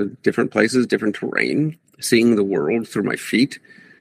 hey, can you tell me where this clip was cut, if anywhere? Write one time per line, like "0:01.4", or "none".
none